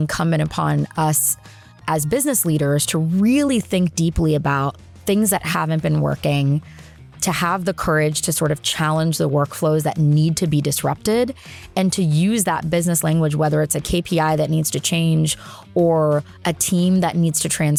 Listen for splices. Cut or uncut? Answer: uncut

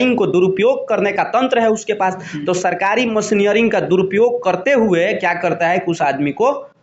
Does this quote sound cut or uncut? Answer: uncut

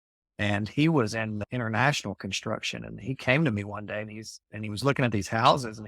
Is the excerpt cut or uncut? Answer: uncut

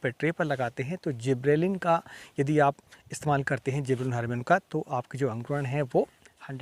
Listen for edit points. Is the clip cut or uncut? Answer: uncut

